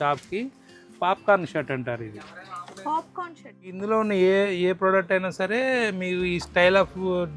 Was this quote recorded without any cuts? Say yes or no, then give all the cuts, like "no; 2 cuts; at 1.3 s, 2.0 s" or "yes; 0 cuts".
no; 1 cut; at 3.8 s